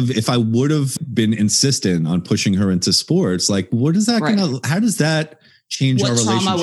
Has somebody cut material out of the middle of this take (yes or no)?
yes